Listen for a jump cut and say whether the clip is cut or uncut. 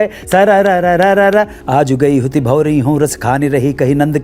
cut